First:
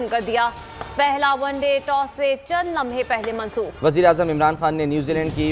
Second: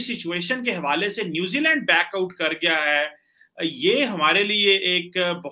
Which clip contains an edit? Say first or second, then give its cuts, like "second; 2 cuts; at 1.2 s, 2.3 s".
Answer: first; 1 cut; at 3.7 s